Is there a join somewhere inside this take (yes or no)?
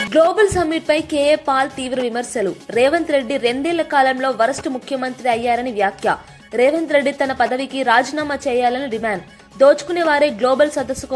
no